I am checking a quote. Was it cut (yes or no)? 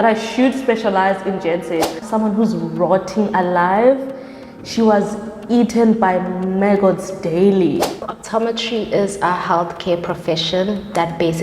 yes